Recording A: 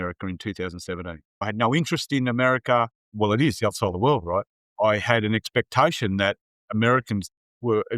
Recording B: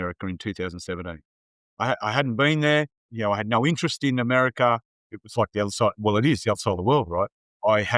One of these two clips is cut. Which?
A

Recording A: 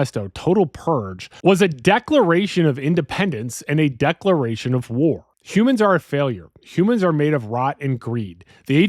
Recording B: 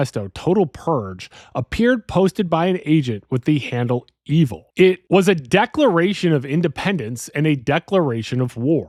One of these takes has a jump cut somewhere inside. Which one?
A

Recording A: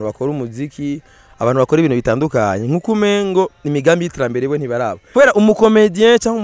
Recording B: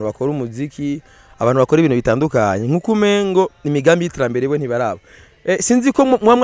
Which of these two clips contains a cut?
A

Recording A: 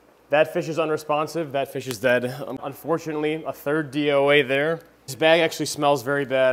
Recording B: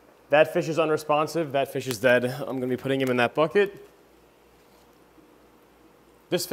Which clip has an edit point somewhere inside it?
A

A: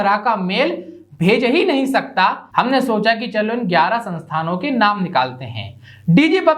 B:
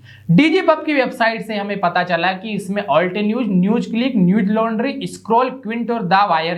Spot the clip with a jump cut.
A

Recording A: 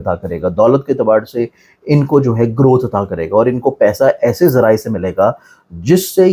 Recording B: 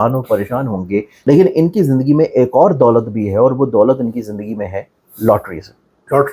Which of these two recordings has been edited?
B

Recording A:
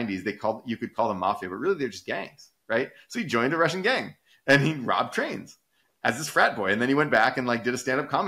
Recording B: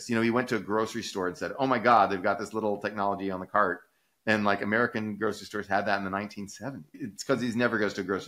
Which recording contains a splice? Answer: B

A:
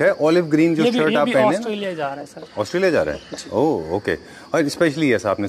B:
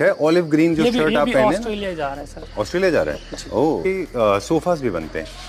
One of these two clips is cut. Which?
B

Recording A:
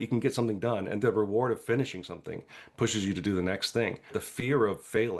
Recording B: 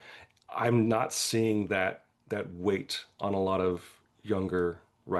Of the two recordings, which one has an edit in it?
A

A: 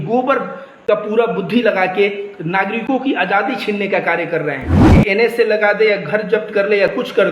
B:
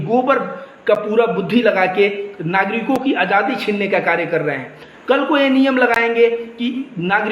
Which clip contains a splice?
A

